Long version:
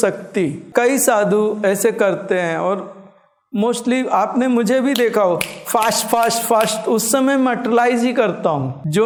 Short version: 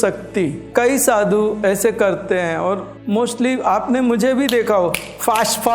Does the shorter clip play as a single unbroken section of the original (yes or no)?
no